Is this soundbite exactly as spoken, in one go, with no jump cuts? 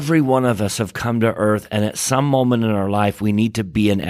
yes; 0 cuts

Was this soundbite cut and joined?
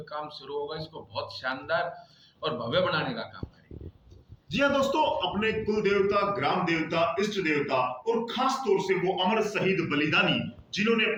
no; 0 cuts

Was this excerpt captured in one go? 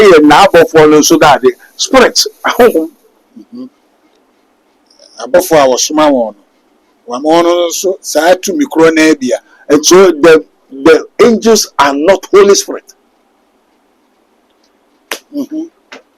yes; 0 cuts

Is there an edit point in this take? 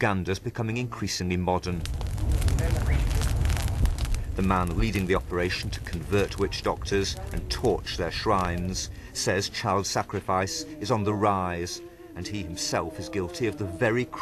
no; 0 cuts

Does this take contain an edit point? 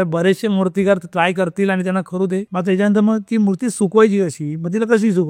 yes; 1 cut; at 2.5 s

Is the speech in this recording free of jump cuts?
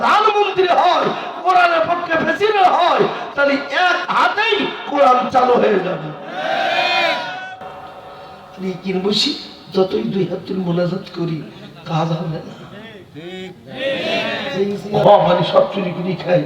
no; 1 cut; at 14.9 s

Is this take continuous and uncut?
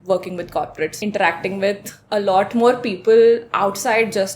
no; 1 cut; at 1.0 s

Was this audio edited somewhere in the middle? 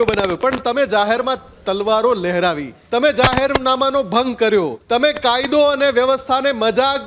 yes; 2 cuts; at 2.7 s, 4.8 s

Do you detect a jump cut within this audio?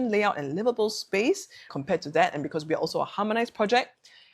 no; 0 cuts

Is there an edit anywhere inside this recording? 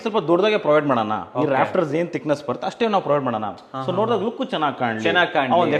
no; 0 cuts

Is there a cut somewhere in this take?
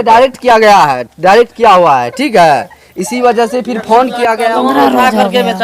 yes; 1 cut; at 4.4 s

